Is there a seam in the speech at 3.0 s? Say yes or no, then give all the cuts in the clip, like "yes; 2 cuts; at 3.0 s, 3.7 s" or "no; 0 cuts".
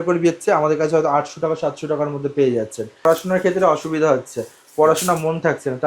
yes; 1 cut; at 3.0 s